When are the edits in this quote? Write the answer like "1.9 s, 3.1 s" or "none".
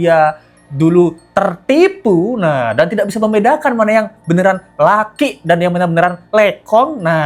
none